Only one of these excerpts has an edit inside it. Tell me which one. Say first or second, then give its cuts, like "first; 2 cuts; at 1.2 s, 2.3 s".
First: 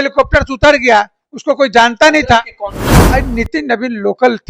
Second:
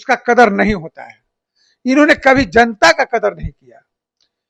first; 1 cut; at 2.9 s